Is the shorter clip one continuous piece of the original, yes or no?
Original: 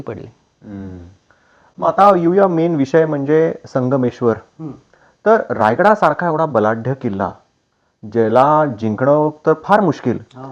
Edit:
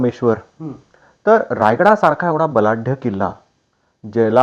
yes